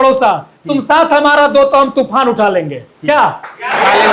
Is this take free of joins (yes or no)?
yes